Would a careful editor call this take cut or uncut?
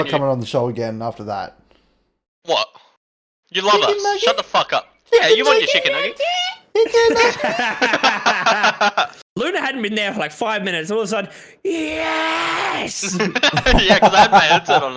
cut